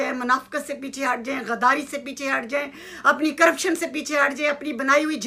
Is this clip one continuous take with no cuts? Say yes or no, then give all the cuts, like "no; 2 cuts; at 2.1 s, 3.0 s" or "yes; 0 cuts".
yes; 0 cuts